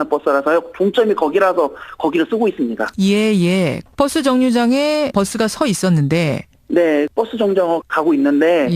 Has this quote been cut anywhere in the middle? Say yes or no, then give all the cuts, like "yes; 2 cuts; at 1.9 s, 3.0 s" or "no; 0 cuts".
no; 0 cuts